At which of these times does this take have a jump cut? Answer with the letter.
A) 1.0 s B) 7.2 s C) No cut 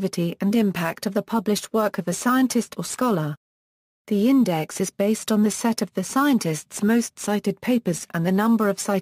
A